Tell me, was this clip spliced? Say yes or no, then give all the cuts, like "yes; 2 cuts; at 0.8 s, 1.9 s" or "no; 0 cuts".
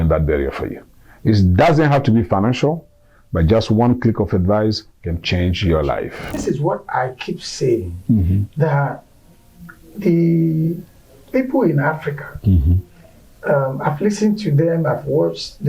yes; 1 cut; at 6.4 s